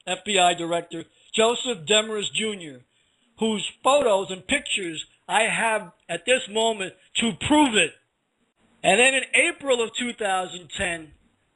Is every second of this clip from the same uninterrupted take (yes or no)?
no